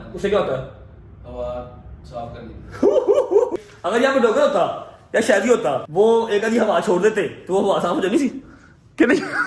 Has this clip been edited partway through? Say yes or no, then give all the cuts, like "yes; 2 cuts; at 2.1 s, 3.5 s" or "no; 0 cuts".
yes; 2 cuts; at 3.5 s, 5.9 s